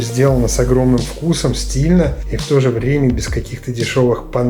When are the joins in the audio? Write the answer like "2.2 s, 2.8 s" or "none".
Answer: 2.3 s